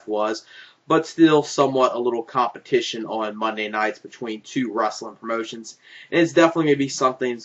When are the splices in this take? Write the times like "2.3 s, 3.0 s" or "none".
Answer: 5.1 s